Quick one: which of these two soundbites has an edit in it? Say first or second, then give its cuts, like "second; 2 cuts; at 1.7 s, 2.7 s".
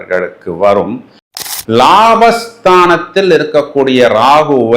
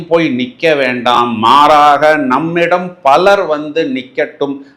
first; 1 cut; at 1.4 s